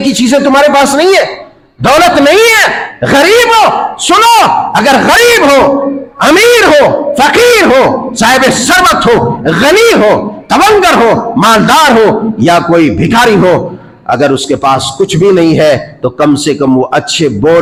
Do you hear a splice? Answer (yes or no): no